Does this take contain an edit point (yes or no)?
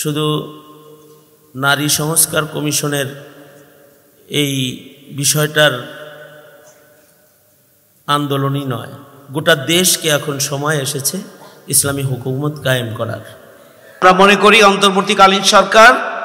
yes